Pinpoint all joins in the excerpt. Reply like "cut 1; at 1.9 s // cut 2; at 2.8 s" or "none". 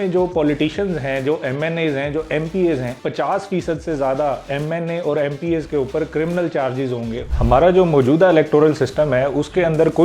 cut 1; at 3.0 s // cut 2; at 7.3 s